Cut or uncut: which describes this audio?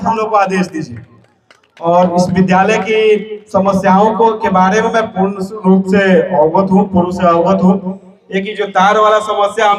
uncut